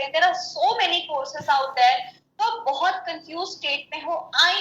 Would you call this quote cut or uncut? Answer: uncut